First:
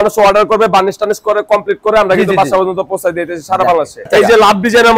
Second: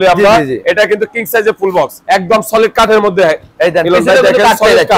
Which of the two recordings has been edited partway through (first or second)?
first